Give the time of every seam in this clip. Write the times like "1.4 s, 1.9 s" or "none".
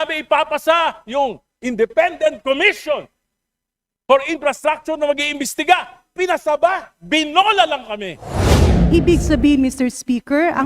8.7 s